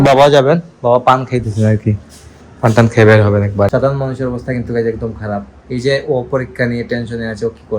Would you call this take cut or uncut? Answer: cut